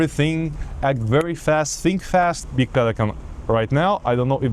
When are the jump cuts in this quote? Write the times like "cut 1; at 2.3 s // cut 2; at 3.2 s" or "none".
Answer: cut 1; at 2.4 s